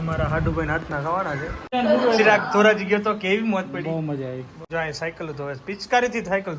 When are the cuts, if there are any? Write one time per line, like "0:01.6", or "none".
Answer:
0:01.7
0:04.6